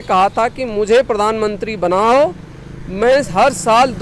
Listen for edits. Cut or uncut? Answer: uncut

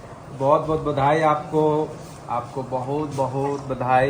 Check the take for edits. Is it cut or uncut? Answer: uncut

